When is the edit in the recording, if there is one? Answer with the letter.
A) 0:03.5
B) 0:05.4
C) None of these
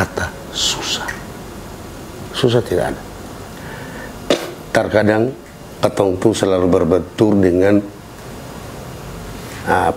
A